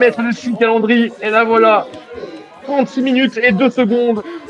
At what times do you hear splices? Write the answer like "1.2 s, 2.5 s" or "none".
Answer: none